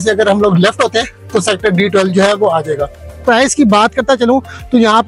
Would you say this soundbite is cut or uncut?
cut